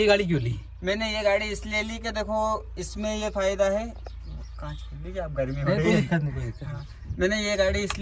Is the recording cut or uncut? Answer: uncut